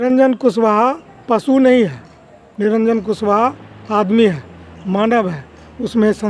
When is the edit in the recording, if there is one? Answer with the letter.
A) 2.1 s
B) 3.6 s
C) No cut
C